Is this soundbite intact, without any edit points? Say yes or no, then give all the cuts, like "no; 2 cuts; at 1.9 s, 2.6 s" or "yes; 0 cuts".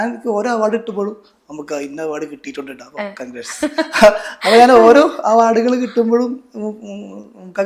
yes; 0 cuts